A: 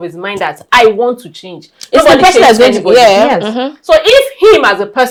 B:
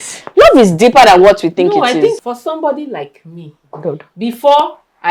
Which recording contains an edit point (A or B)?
B